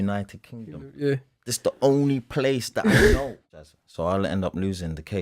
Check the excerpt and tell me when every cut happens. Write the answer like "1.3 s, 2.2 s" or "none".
3.6 s